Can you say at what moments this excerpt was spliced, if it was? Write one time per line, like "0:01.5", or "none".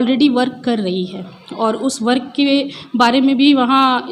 none